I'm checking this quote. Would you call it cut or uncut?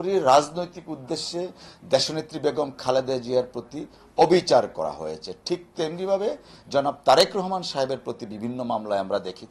uncut